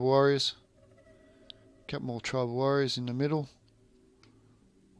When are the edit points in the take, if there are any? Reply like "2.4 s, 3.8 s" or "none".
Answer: none

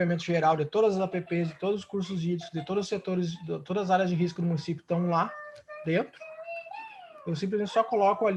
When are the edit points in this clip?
none

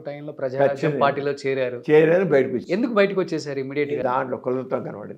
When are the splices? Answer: 4.0 s

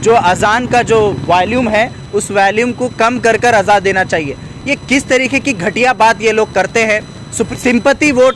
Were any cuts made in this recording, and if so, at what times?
7.4 s

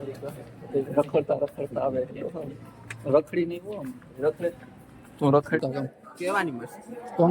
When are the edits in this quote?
5.6 s

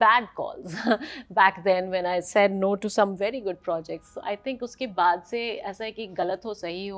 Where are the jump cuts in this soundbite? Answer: none

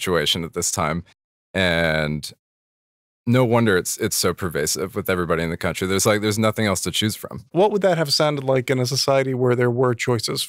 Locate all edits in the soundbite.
7.5 s

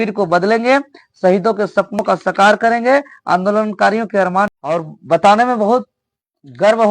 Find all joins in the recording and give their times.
4.6 s

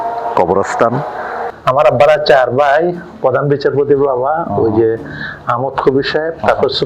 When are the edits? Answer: 1.5 s

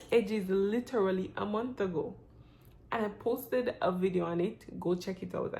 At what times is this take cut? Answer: none

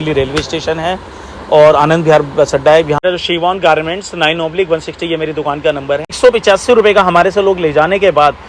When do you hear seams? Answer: 3.0 s, 6.2 s

